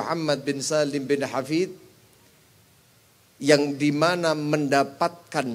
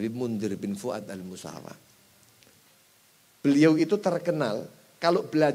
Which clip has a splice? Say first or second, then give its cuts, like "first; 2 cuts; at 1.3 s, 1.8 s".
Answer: second; 1 cut; at 2.6 s